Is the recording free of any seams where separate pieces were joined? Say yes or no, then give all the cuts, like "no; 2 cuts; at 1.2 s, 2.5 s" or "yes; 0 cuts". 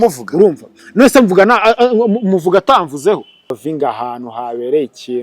no; 1 cut; at 3.5 s